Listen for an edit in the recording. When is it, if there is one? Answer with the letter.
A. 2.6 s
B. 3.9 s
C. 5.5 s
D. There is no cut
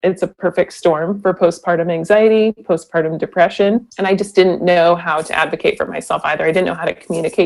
B